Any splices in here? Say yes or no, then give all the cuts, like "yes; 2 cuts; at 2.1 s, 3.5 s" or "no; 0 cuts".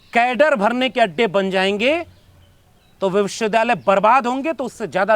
no; 0 cuts